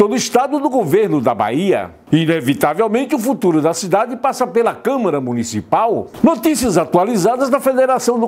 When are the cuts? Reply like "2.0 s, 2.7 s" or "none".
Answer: 1.9 s, 6.1 s